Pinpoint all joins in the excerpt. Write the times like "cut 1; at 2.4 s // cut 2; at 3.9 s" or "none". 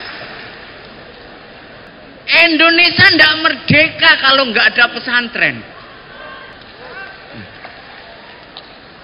cut 1; at 1.9 s // cut 2; at 6.5 s

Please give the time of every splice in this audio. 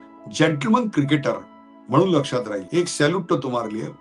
cut 1; at 2.6 s

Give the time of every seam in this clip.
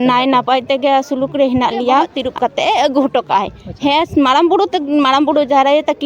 cut 1; at 2.2 s

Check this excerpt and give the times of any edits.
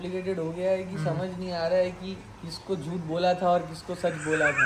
none

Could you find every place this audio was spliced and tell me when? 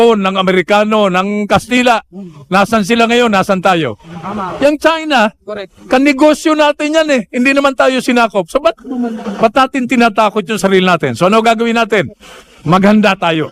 none

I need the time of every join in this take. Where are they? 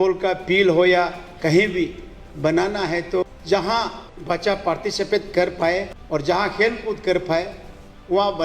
cut 1; at 3.2 s // cut 2; at 4.1 s // cut 3; at 6.0 s

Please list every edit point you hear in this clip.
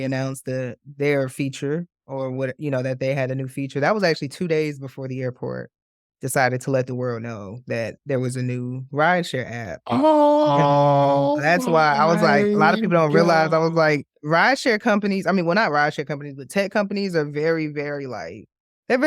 none

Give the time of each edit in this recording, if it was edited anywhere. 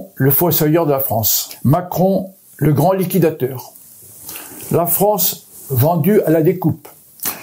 cut 1; at 1.4 s

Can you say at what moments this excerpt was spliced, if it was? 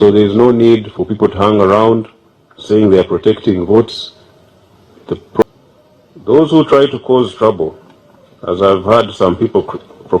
cut 1; at 5.4 s

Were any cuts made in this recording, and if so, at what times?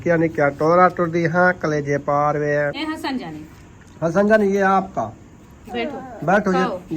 cut 1; at 2.9 s

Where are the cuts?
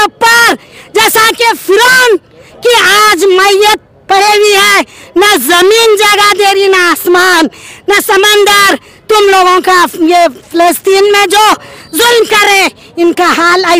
none

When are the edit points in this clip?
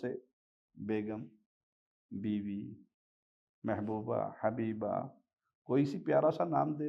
none

